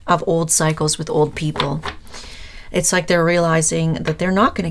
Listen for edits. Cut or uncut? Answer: uncut